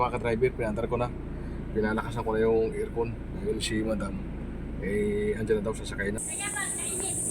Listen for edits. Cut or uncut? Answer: cut